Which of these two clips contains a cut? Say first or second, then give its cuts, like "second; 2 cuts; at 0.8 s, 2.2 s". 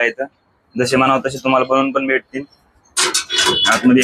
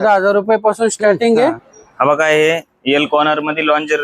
second; 1 cut; at 1.7 s